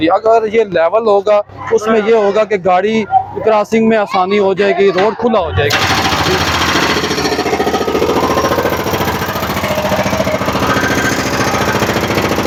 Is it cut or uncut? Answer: uncut